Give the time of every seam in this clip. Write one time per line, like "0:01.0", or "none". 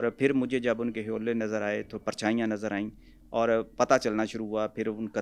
none